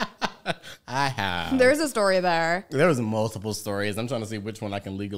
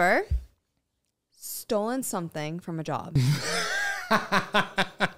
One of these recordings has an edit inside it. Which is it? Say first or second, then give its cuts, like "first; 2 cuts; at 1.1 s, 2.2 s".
second; 1 cut; at 3.2 s